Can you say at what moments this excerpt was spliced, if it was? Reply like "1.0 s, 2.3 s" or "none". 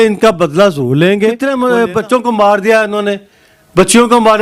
1.4 s